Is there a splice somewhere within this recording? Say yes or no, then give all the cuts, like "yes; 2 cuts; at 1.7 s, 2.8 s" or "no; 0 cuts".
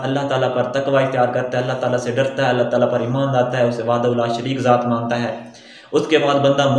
no; 0 cuts